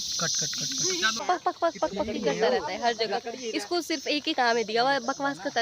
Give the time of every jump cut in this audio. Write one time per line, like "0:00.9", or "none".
0:01.2